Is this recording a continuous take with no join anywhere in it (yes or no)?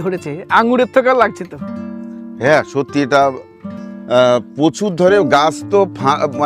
yes